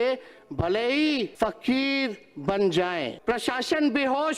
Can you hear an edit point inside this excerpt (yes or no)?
yes